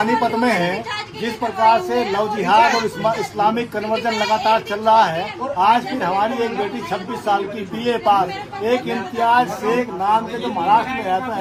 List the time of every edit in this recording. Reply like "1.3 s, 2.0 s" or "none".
none